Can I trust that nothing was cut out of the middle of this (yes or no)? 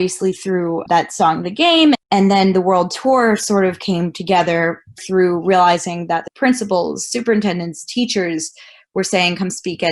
no